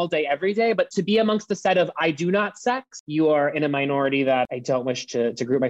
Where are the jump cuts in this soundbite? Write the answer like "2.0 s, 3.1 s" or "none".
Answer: 0.9 s, 2.9 s, 4.5 s

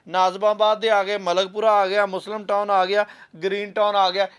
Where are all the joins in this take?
none

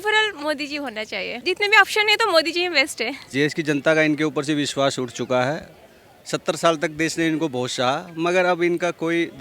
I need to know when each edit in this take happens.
1.3 s, 3.3 s

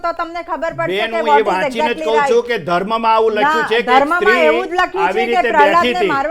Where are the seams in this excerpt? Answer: none

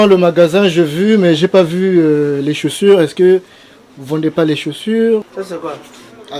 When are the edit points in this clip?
5.3 s

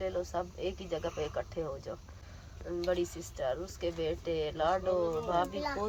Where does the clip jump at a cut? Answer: none

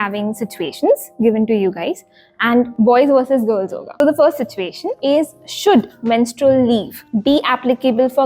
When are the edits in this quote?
2.7 s, 4.0 s, 4.9 s, 7.0 s

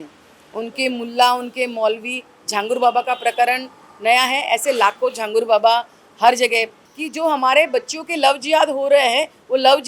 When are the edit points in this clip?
6.8 s

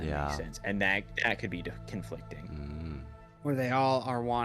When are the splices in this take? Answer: 3.2 s

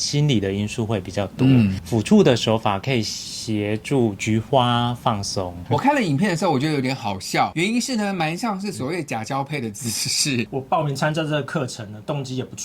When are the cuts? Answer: 1.8 s, 5.5 s, 10.5 s

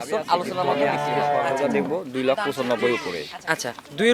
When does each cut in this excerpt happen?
1.6 s

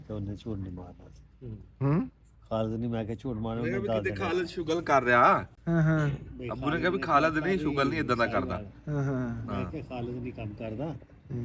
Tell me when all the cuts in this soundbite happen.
none

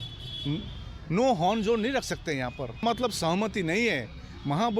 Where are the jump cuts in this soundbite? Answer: 2.8 s

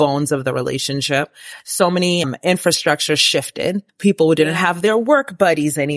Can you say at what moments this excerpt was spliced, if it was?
2.3 s, 3.9 s

